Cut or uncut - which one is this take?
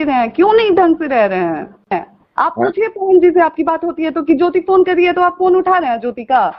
cut